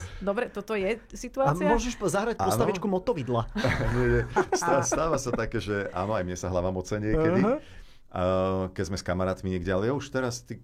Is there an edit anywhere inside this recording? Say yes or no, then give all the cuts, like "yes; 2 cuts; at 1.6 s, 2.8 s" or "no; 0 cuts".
no; 0 cuts